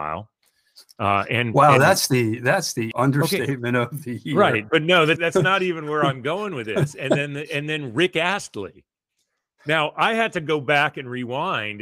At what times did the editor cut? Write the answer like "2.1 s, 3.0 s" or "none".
2.9 s, 5.2 s